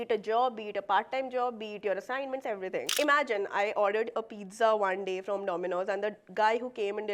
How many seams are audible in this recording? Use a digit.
1